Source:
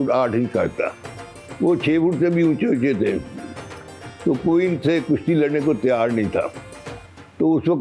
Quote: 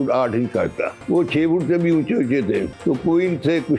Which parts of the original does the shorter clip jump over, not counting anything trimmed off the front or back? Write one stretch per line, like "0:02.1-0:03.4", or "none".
0:00.9-0:01.4
0:03.2-0:04.1